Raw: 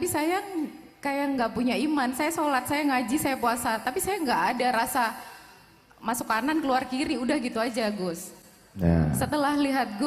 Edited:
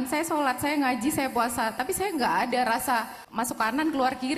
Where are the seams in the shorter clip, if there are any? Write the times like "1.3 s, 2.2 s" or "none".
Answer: 3.2 s